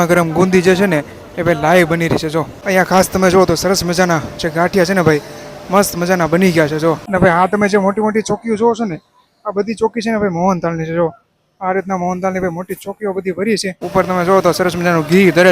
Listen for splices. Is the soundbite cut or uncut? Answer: cut